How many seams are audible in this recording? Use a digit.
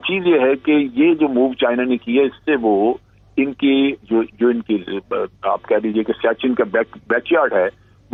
0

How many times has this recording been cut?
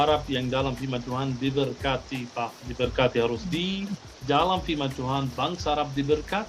1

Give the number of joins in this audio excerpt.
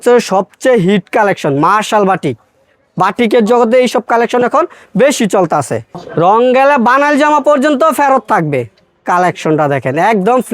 1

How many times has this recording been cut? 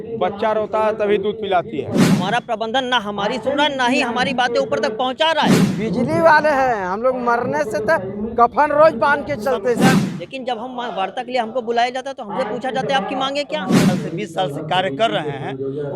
4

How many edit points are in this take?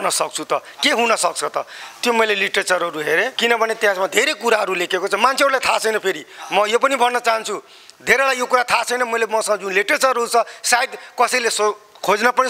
1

